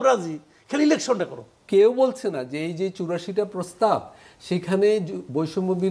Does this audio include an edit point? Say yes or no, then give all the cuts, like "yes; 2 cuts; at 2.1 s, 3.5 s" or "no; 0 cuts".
yes; 1 cut; at 1.6 s